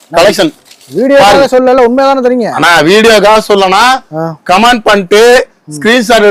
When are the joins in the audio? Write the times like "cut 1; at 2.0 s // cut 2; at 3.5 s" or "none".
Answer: none